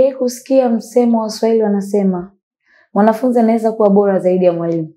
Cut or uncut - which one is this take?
uncut